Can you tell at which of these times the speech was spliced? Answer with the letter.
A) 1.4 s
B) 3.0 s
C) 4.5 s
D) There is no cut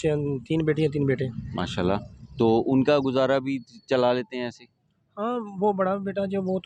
D